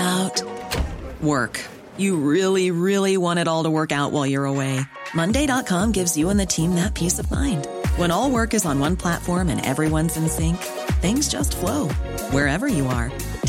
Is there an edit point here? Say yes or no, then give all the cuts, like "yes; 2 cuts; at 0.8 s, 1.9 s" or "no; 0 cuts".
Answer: no; 0 cuts